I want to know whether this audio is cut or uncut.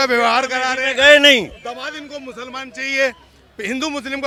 uncut